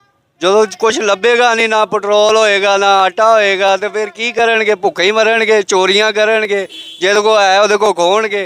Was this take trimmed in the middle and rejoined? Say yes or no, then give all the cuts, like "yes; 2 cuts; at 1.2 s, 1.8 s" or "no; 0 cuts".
no; 0 cuts